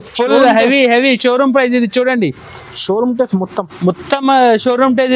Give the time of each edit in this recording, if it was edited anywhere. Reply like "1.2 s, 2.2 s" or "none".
none